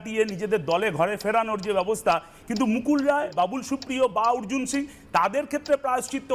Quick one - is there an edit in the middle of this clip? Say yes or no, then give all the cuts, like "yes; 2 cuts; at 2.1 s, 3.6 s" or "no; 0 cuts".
yes; 2 cuts; at 2.3 s, 3.3 s